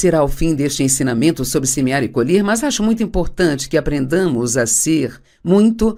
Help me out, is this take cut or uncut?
uncut